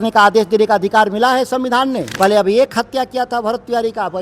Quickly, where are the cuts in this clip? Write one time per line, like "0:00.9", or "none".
0:02.1

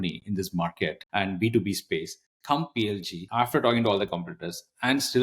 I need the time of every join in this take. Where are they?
0:01.0
0:03.2

